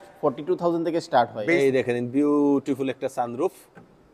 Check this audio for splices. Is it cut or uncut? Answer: cut